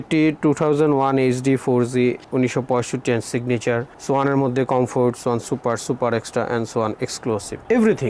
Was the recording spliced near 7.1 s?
no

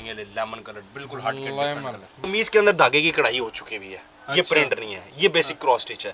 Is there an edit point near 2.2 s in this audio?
yes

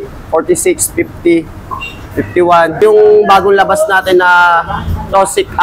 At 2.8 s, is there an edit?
yes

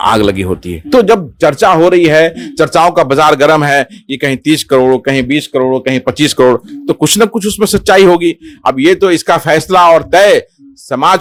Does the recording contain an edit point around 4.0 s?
no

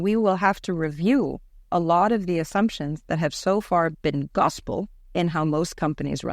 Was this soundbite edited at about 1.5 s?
no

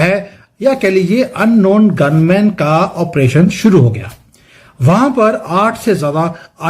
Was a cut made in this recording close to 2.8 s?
no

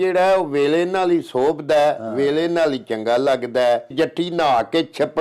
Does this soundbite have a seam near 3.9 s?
yes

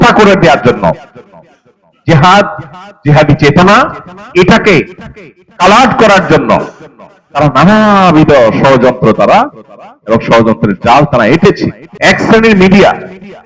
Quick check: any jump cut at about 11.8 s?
yes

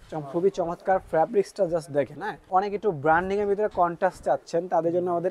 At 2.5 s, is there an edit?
yes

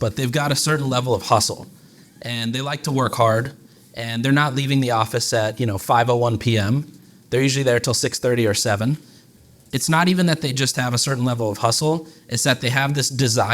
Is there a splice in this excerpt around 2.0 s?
no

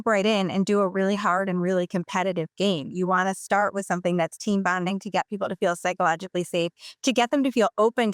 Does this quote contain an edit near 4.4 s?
no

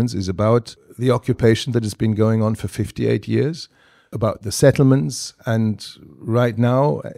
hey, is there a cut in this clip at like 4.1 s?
yes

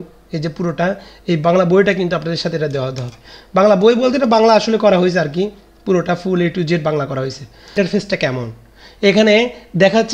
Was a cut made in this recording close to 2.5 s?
no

